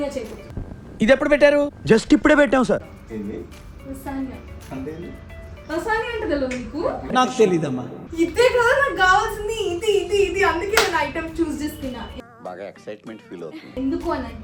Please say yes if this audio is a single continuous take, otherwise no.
yes